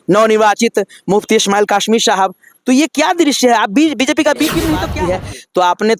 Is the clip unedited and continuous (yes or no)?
no